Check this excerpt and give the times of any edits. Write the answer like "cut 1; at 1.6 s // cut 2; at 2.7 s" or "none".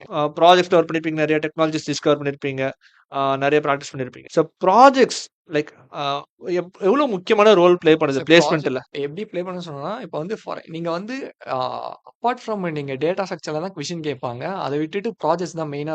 none